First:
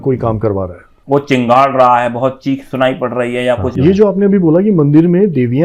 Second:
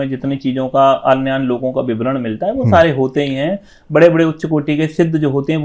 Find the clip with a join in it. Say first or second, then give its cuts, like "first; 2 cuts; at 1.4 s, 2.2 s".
first; 2 cuts; at 0.9 s, 3.7 s